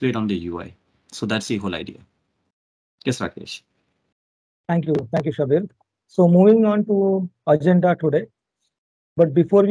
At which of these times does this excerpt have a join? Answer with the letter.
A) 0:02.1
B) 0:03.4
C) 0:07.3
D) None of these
D